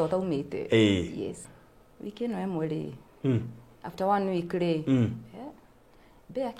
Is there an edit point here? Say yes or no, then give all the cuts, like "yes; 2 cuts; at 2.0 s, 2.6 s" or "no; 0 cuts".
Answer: yes; 1 cut; at 1.5 s